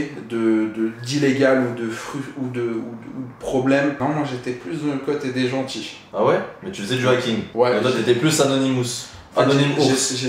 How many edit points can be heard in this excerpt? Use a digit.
1